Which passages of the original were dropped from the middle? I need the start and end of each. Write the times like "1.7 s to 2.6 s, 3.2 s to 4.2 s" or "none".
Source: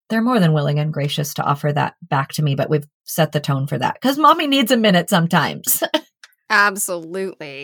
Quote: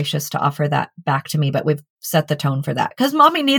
none